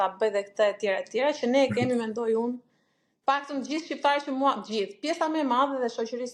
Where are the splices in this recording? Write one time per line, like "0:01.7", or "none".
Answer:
none